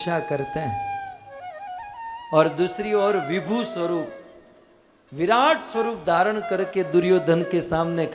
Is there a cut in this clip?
no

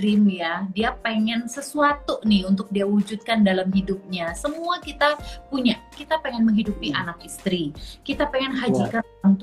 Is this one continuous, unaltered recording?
no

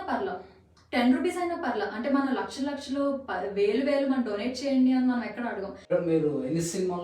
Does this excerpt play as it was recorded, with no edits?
no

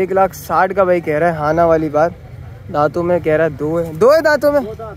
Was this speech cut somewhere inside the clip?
no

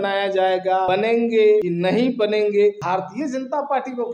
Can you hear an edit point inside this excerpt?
yes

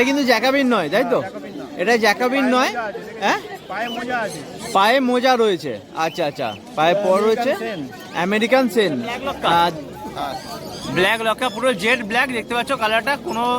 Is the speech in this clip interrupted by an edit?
yes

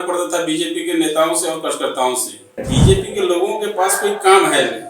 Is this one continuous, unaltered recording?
no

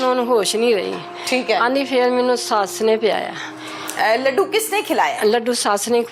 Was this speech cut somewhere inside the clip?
no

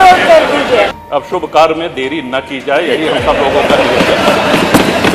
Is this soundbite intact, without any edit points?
no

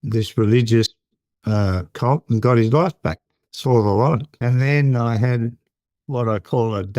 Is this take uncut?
no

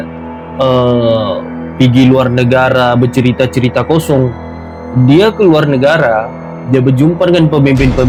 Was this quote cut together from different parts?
no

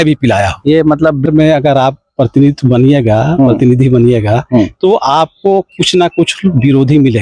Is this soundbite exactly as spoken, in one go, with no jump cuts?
no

